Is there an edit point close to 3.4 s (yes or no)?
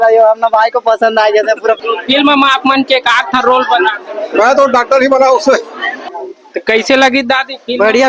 no